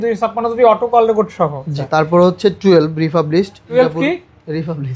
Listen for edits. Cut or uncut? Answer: cut